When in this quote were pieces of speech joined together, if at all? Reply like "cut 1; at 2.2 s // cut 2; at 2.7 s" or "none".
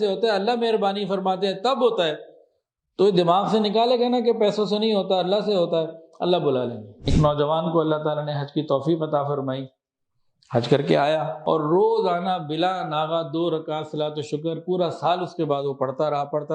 cut 1; at 6.9 s // cut 2; at 11.3 s